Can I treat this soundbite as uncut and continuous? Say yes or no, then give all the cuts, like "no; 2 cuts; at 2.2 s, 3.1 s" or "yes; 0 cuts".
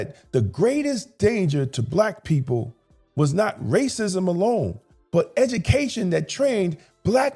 yes; 0 cuts